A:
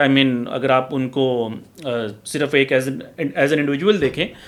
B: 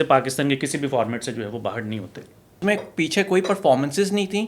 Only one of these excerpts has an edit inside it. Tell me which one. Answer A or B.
B